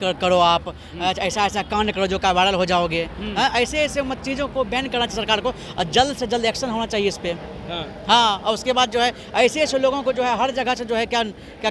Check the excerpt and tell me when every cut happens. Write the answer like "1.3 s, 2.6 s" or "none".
none